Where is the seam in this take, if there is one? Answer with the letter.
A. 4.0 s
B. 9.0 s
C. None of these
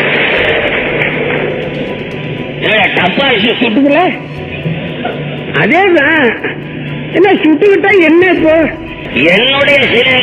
B